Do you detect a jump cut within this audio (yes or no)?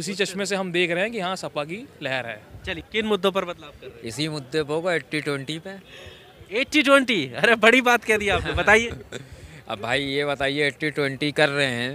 yes